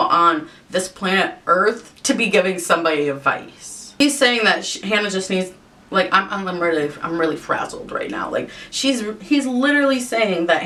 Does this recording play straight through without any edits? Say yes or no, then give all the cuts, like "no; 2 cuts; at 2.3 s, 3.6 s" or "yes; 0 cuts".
yes; 0 cuts